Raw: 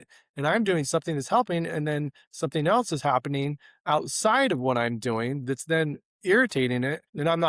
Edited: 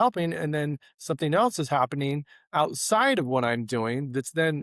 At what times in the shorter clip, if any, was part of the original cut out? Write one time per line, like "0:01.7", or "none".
none